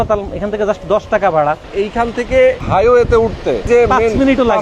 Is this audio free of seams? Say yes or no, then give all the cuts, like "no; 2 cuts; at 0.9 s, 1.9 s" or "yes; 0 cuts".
no; 3 cuts; at 1.7 s, 2.6 s, 3.7 s